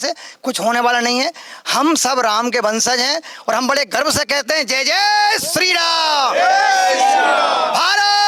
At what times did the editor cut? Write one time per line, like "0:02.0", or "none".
none